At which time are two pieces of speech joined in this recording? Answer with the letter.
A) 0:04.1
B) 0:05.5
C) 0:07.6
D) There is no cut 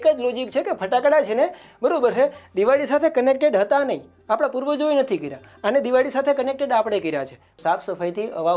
C